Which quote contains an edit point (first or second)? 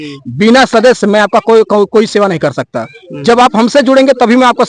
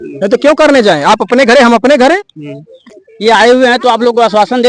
second